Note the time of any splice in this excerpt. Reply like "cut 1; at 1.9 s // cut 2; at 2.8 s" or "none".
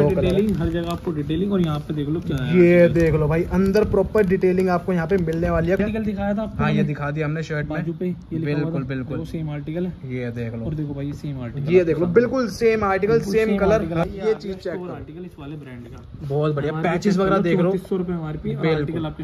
cut 1; at 5.8 s // cut 2; at 14.0 s